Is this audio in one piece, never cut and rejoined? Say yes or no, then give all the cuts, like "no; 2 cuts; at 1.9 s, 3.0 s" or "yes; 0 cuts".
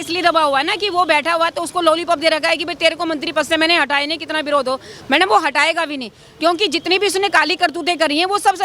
yes; 0 cuts